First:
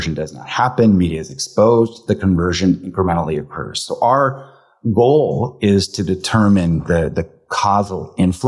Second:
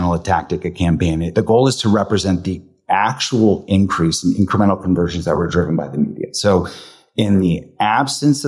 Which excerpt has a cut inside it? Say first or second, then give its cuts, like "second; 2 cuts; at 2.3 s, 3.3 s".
second; 1 cut; at 1.3 s